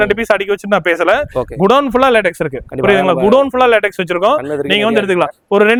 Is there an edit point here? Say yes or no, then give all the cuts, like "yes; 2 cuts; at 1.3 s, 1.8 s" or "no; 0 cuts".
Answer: no; 0 cuts